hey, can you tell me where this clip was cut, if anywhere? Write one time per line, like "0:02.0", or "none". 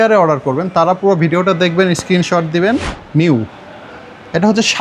0:03.0